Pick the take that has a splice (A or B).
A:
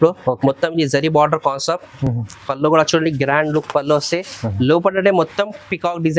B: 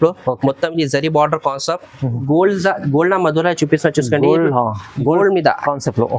B